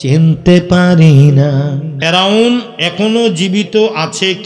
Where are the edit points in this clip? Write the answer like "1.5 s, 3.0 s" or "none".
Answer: 1.9 s